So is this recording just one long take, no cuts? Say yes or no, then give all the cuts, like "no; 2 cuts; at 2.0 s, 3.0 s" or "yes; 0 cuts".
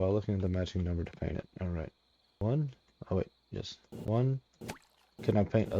no; 2 cuts; at 2.4 s, 4.1 s